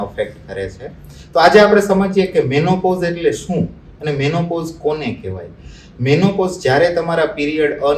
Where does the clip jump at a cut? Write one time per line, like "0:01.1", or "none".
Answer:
none